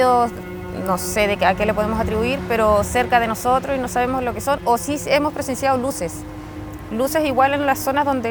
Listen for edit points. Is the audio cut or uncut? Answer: uncut